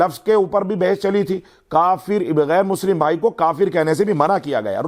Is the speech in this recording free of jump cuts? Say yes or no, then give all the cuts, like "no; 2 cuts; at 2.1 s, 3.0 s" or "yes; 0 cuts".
yes; 0 cuts